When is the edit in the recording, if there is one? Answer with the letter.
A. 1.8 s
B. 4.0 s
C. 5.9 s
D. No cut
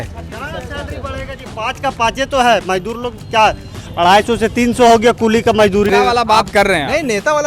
C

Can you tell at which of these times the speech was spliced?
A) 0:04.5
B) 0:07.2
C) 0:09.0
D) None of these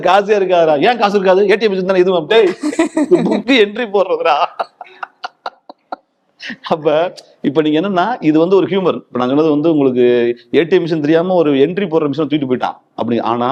D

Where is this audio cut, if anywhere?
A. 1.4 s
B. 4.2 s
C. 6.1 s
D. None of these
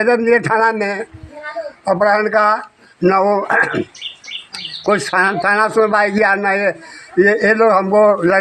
D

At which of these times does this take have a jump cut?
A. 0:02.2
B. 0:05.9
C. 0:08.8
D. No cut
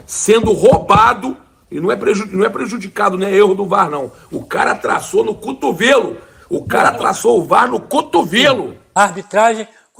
C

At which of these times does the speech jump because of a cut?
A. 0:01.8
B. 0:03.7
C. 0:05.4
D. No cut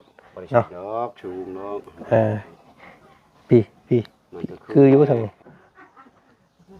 C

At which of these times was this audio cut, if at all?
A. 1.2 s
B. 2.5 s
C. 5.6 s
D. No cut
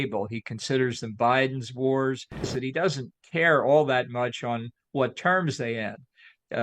B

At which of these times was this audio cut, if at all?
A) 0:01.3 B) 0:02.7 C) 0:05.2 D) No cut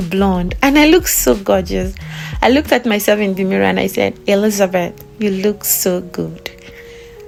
D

